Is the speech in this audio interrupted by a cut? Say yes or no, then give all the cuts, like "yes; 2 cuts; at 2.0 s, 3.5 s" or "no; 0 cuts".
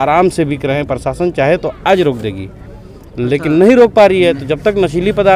no; 0 cuts